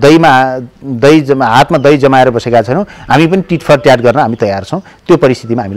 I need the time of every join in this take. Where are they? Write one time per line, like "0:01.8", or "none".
none